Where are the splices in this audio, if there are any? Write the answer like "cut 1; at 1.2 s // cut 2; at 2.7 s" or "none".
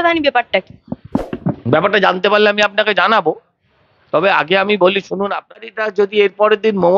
cut 1; at 5.6 s